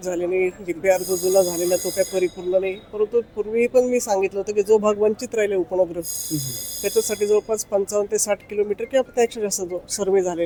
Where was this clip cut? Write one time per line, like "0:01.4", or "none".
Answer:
none